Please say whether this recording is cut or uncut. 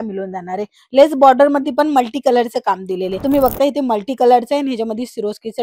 cut